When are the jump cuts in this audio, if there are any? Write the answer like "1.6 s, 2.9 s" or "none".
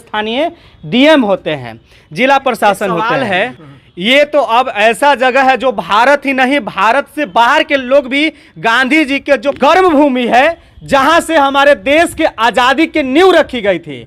3.1 s, 9.6 s